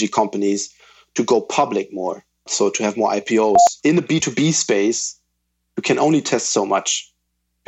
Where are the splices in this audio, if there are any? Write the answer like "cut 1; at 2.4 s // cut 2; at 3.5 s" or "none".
cut 1; at 2.5 s // cut 2; at 3.7 s